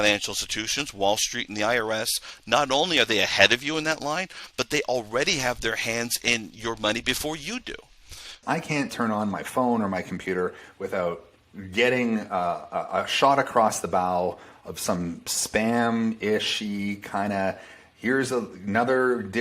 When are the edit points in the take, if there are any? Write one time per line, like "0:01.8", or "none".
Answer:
0:08.4